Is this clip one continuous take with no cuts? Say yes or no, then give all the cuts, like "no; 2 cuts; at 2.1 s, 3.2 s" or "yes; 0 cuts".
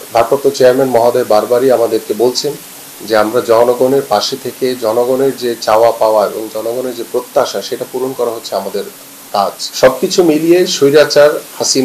no; 1 cut; at 9.6 s